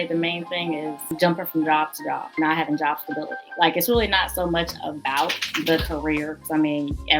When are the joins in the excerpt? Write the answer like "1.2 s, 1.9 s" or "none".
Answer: 1.1 s, 2.3 s, 3.4 s